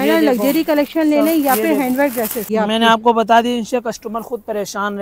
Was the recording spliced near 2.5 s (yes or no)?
yes